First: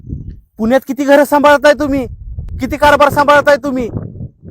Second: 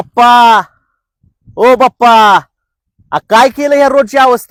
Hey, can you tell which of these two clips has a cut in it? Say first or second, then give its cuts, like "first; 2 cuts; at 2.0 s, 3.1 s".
first; 1 cut; at 2.5 s